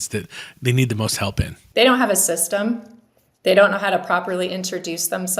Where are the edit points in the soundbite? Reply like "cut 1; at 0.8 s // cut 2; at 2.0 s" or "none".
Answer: cut 1; at 1.6 s